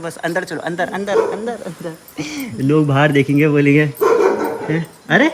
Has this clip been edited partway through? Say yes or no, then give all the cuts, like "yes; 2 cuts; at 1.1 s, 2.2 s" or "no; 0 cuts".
no; 0 cuts